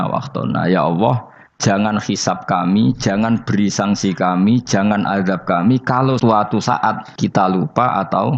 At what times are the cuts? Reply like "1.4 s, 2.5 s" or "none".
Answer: 6.2 s, 7.1 s